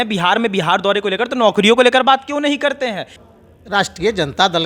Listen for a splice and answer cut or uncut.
cut